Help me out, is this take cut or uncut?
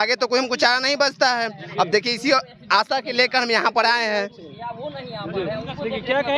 uncut